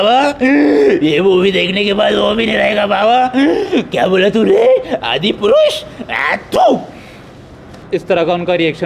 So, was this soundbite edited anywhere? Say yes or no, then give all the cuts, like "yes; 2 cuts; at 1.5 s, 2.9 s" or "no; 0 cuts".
yes; 1 cut; at 7.8 s